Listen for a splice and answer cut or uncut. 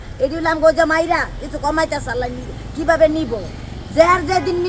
uncut